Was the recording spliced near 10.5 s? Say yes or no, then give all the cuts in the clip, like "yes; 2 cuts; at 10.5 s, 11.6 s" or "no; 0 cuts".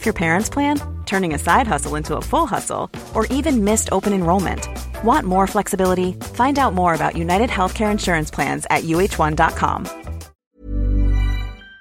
yes; 1 cut; at 10.5 s